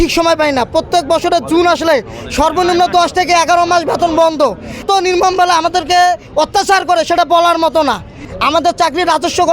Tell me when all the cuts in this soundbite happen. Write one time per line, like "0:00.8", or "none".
0:04.8
0:08.3